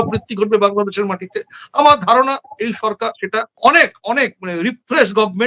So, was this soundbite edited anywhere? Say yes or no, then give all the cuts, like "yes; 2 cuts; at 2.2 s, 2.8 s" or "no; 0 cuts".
no; 0 cuts